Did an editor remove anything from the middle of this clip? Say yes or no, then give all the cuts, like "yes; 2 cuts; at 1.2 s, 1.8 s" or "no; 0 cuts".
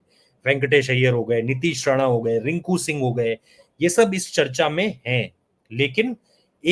no; 0 cuts